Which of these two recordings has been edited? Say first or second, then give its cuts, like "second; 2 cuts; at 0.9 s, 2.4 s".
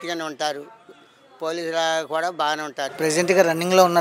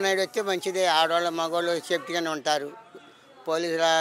first; 1 cut; at 2.9 s